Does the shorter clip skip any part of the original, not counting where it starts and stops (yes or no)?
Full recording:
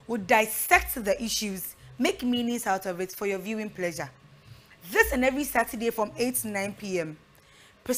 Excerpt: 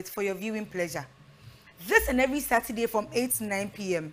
no